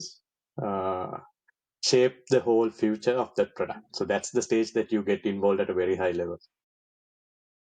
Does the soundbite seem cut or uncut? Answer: uncut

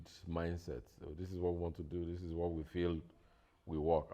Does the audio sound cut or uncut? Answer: uncut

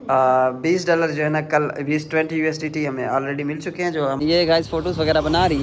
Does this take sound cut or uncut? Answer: cut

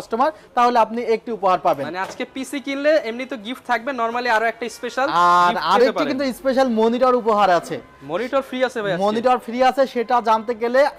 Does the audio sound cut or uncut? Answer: uncut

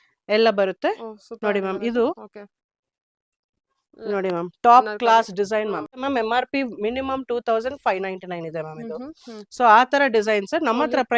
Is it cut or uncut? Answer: cut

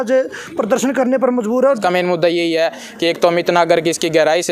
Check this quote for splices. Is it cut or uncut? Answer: cut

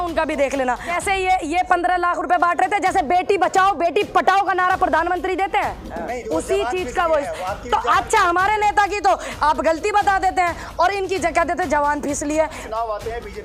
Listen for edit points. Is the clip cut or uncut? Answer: cut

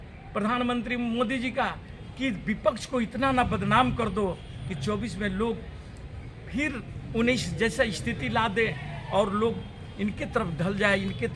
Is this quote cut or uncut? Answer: uncut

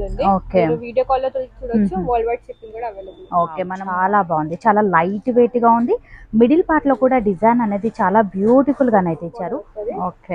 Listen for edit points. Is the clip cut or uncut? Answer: cut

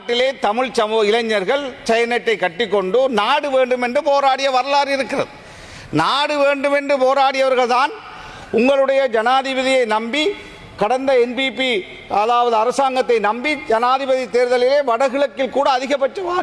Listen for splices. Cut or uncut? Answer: uncut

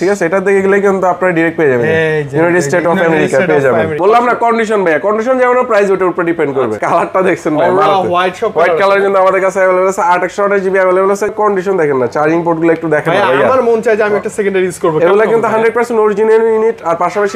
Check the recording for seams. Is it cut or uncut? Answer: cut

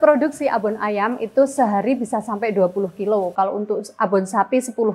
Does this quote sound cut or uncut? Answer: uncut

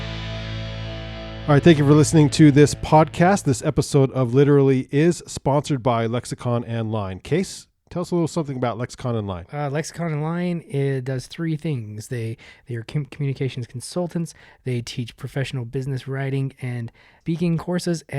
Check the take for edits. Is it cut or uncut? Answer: cut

